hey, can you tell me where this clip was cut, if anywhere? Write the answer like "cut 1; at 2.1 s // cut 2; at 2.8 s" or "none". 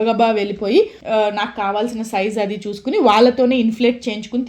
cut 1; at 1.0 s